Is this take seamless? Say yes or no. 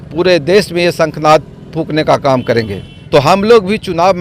no